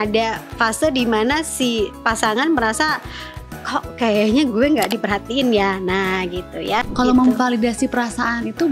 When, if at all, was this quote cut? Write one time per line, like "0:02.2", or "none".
0:06.9